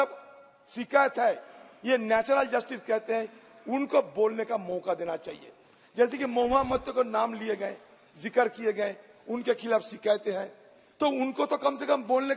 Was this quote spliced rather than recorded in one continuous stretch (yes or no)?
no